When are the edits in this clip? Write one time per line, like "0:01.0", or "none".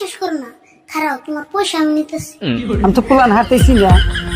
0:02.6